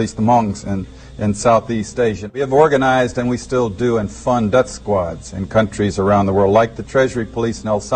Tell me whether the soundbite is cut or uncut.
uncut